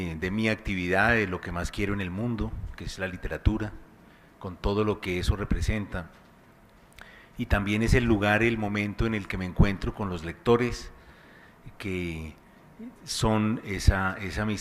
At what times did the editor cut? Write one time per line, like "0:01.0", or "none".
0:08.3